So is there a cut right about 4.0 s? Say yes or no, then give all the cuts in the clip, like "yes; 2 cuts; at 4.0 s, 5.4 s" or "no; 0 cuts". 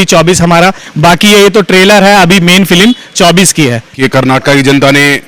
yes; 1 cut; at 4.0 s